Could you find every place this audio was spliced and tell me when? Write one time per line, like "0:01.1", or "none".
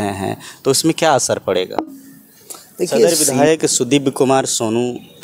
0:03.1